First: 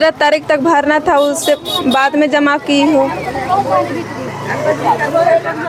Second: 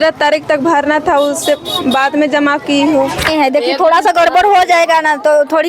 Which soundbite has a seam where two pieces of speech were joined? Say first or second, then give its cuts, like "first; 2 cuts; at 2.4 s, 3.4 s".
second; 1 cut; at 3.3 s